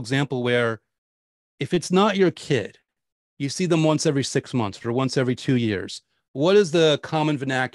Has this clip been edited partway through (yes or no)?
no